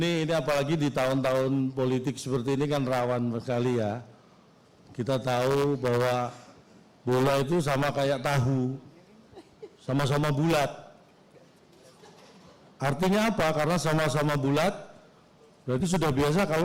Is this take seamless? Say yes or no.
yes